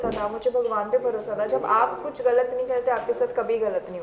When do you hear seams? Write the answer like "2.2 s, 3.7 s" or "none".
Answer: none